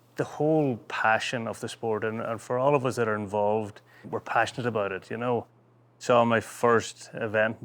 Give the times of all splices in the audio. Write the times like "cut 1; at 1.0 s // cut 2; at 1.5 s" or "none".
cut 1; at 4.1 s // cut 2; at 6.0 s